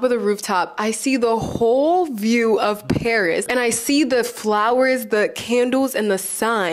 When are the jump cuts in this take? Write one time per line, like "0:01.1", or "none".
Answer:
none